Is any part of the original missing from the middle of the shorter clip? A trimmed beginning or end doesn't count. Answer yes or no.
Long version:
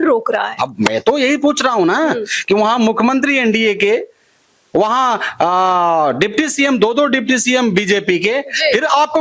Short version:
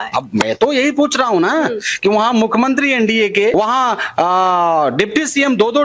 yes